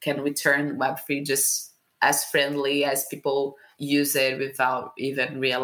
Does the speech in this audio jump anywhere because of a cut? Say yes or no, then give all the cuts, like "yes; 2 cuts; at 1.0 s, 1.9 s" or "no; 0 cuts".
yes; 1 cut; at 3.7 s